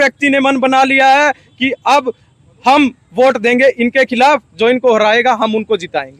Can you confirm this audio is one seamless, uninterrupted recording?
yes; 0 cuts

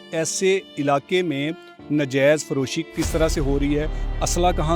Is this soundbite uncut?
no; 1 cut; at 2.8 s

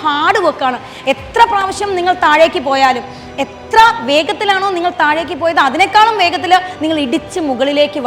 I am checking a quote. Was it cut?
no; 0 cuts

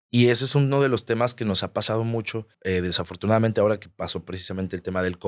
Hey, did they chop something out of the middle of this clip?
yes; 1 cut; at 2.5 s

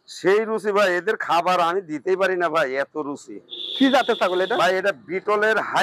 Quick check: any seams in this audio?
no; 0 cuts

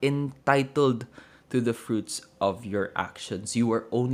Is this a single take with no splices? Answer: yes; 0 cuts

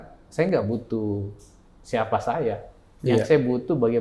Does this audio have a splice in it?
no; 0 cuts

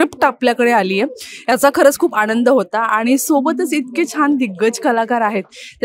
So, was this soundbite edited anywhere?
no; 0 cuts

